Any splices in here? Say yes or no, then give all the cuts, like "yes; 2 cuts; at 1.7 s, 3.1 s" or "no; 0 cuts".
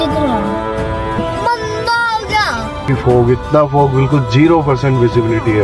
yes; 2 cuts; at 1.2 s, 2.9 s